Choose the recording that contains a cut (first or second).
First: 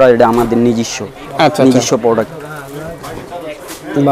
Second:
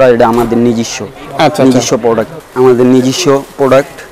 second